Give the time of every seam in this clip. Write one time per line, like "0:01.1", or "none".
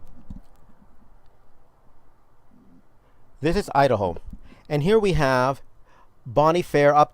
0:05.6